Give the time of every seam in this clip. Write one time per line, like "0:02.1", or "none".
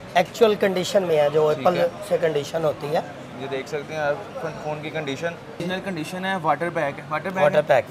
0:05.6